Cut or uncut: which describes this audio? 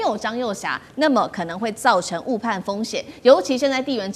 uncut